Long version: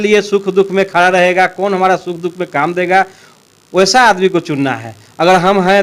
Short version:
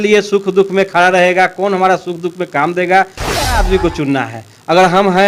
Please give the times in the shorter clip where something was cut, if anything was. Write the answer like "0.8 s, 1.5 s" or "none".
3.6 s